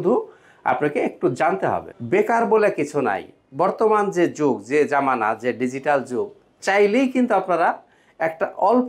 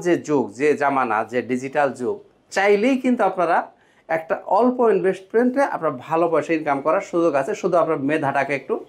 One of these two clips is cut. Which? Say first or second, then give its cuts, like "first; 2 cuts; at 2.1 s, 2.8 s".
first; 1 cut; at 1.9 s